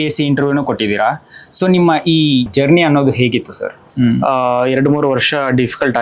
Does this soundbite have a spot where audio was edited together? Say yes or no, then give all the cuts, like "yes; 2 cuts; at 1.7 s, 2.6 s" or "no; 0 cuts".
yes; 2 cuts; at 2.5 s, 3.8 s